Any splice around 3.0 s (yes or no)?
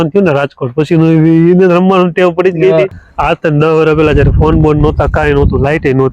yes